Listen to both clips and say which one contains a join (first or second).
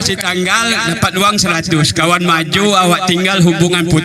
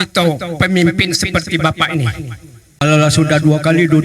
second